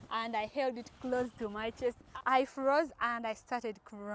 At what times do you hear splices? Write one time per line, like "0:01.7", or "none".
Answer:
0:02.0

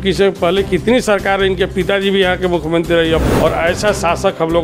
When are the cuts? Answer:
0:03.2

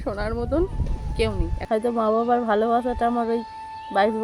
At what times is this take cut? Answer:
0:01.6

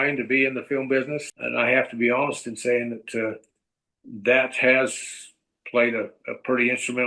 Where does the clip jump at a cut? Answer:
0:01.2

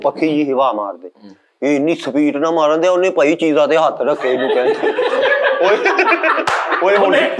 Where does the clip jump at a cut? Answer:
none

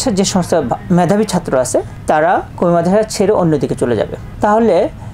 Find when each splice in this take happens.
none

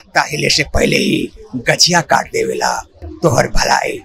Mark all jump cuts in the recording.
none

